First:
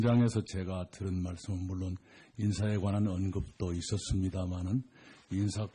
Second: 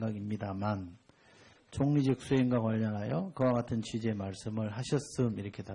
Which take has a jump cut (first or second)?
second